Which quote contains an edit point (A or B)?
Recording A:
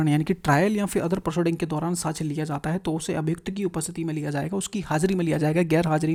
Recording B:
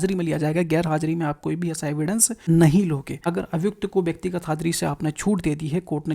B